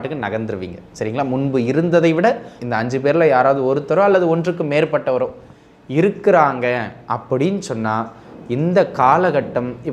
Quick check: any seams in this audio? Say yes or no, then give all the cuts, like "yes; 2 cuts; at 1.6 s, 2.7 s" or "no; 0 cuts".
yes; 1 cut; at 2.6 s